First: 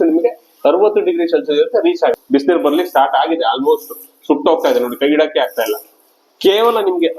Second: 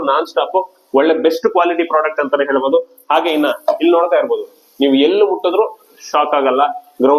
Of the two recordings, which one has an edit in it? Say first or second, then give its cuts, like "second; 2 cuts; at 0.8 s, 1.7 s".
first; 1 cut; at 2.2 s